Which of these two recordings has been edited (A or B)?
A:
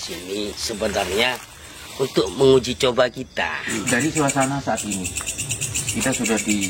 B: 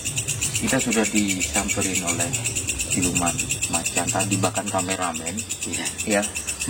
A